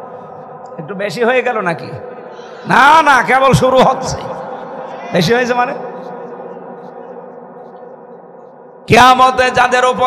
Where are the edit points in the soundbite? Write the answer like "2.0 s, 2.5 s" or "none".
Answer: none